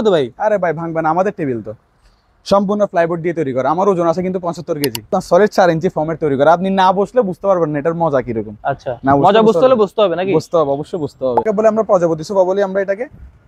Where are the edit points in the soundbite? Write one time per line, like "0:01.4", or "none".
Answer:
0:05.1
0:11.5

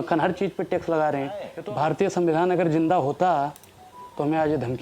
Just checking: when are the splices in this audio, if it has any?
0:01.5

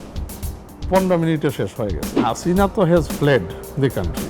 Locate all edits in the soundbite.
0:02.1

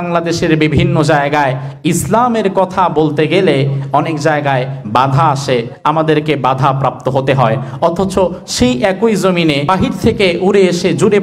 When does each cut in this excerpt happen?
0:09.6

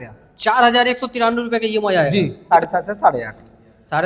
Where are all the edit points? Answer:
0:02.5

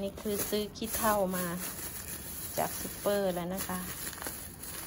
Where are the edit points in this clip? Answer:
none

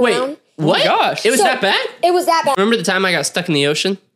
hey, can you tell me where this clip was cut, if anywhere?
0:02.6

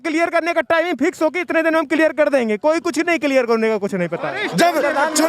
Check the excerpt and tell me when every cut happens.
0:04.2

